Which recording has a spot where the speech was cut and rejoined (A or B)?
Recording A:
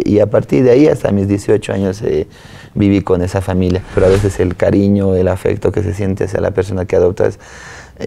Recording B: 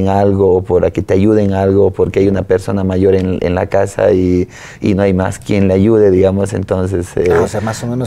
A